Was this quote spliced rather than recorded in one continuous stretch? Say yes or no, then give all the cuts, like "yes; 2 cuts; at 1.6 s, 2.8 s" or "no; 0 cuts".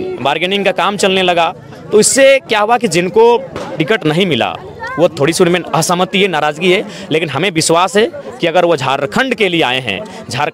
no; 0 cuts